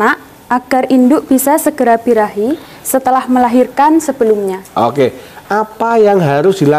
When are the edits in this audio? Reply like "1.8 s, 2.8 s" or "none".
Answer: none

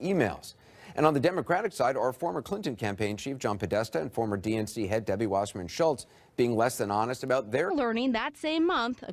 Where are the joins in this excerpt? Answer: none

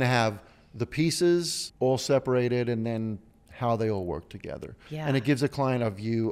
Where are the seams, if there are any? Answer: 1.6 s

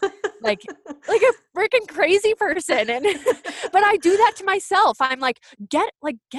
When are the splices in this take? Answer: none

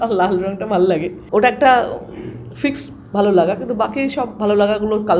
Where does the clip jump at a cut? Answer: 1.2 s

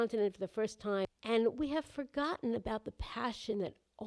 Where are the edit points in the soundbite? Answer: 1.1 s

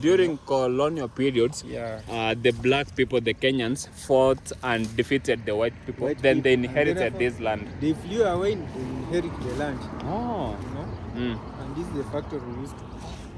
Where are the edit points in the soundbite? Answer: none

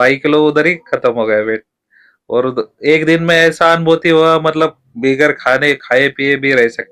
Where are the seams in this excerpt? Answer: none

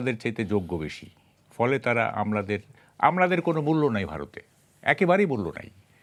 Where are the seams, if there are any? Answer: none

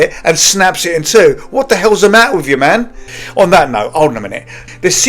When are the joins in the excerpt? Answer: 2.9 s

